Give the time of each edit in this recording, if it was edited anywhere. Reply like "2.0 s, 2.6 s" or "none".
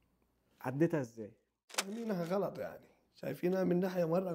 1.8 s